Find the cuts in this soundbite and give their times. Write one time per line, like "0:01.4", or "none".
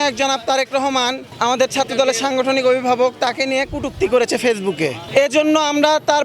0:01.3
0:05.0